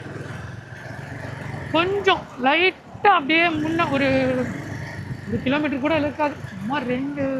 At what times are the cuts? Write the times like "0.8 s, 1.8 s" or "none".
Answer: none

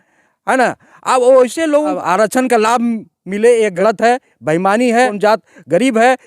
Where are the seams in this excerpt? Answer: 1.9 s, 3.8 s, 5.1 s

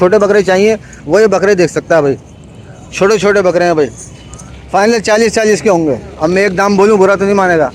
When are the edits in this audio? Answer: none

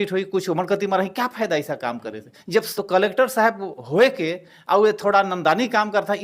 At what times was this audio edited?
2.7 s

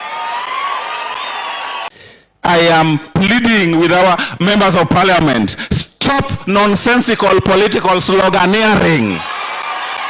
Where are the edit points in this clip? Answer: 1.9 s

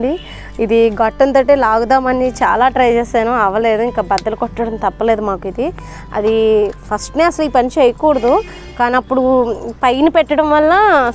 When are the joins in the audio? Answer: none

